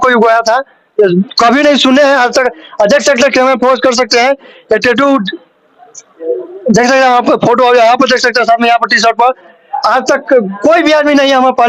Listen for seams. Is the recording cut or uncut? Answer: uncut